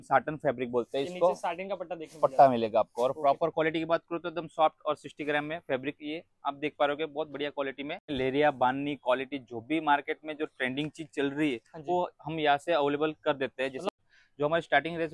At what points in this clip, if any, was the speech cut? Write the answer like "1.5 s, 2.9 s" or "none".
8.0 s, 14.0 s

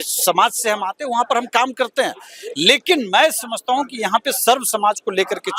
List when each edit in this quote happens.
none

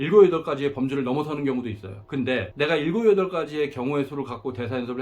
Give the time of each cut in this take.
2.4 s

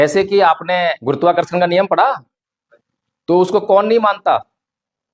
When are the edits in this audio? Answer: 1.0 s

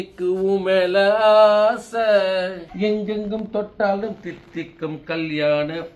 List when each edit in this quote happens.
2.6 s

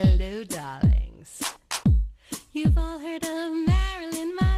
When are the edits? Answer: 1.3 s

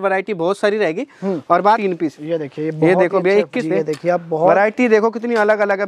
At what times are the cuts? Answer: 1.8 s, 3.6 s

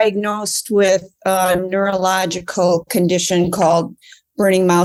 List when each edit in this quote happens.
none

